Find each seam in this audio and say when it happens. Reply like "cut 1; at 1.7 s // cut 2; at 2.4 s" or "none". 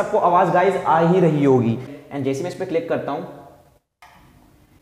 cut 1; at 1.9 s